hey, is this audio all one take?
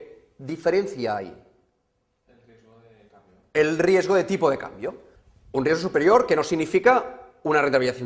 yes; 0 cuts

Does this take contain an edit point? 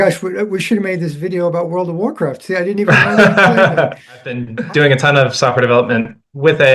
yes; 1 cut; at 4.5 s

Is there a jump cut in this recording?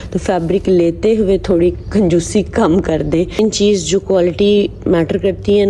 yes; 1 cut; at 3.4 s

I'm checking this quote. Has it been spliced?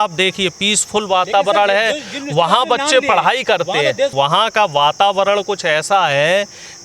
yes; 1 cut; at 4.1 s

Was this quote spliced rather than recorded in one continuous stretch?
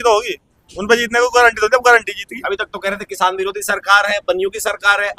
no; 0 cuts

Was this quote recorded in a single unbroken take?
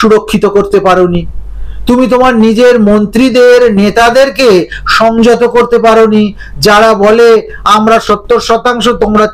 yes; 0 cuts

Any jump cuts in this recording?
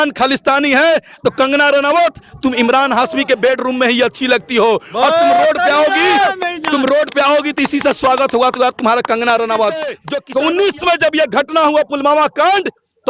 yes; 1 cut; at 10.1 s

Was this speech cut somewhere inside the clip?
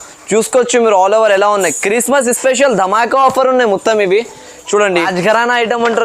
yes; 1 cut; at 5.1 s

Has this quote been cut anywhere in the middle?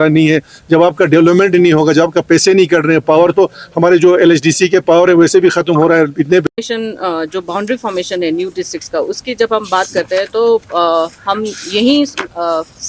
yes; 1 cut; at 6.5 s

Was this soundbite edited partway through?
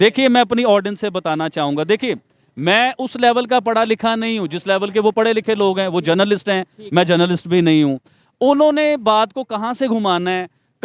no; 0 cuts

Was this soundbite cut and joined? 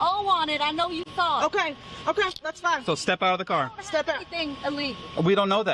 no; 0 cuts

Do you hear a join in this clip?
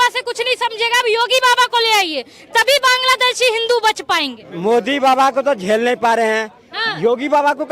no; 0 cuts

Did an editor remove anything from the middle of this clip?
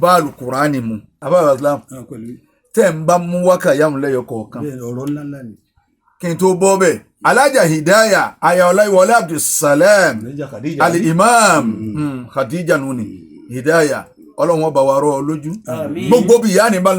yes; 1 cut; at 1.1 s

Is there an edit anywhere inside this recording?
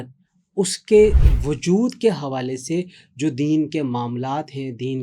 no; 0 cuts

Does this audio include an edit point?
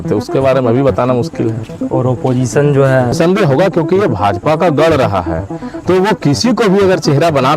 yes; 1 cut; at 3.1 s

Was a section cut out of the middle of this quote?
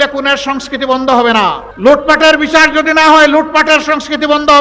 yes; 1 cut; at 1.7 s

